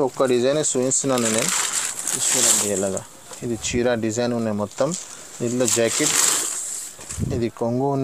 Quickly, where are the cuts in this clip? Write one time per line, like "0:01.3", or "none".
none